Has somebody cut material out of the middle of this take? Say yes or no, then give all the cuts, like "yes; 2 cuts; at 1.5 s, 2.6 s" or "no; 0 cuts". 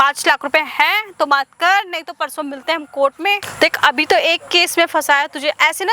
no; 0 cuts